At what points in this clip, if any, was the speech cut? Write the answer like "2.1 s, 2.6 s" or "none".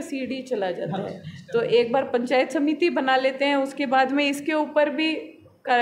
none